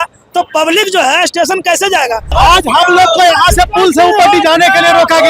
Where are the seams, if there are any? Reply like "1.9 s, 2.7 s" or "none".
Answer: 2.3 s